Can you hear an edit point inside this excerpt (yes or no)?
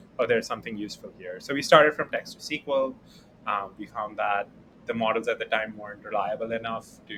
no